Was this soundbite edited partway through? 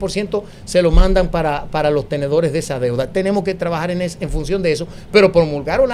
no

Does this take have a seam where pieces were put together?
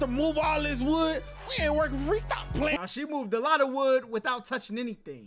no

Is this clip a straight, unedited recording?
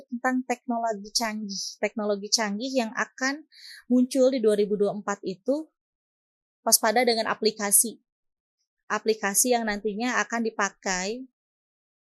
yes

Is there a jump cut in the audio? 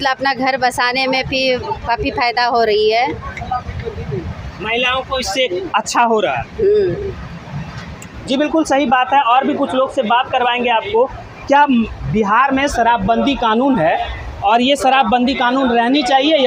no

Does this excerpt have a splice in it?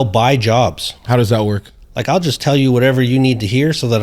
yes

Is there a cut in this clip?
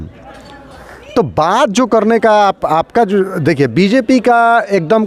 no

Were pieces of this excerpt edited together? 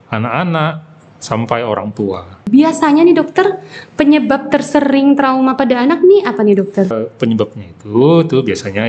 yes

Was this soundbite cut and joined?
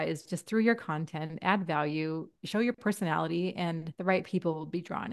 yes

